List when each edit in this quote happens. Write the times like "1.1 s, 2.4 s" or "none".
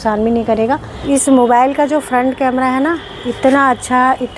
1.0 s